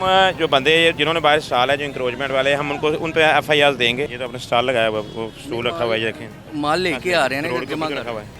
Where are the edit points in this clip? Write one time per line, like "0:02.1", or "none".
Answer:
0:04.2

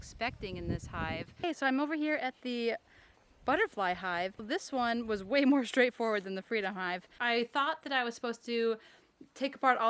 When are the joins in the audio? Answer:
0:01.3
0:04.4
0:07.1

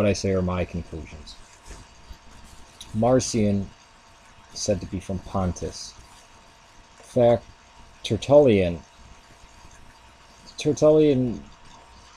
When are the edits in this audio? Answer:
0:01.1

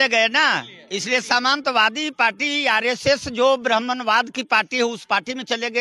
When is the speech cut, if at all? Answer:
none

